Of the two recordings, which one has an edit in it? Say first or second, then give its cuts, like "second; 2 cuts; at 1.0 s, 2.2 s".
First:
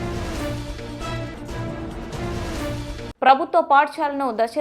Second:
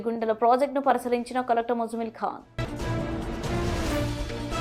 first; 2 cuts; at 2.0 s, 3.0 s